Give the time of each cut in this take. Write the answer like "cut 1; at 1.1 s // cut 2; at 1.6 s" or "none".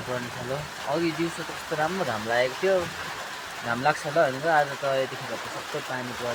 none